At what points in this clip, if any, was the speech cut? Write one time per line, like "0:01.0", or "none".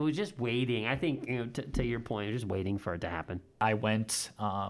0:03.6